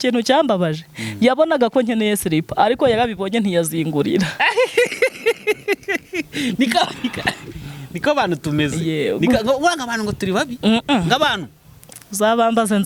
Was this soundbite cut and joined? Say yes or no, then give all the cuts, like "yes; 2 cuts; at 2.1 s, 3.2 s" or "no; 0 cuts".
no; 0 cuts